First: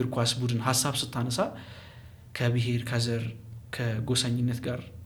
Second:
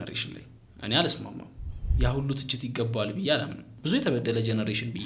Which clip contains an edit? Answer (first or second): second